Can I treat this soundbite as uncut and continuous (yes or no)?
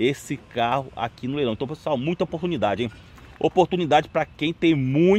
yes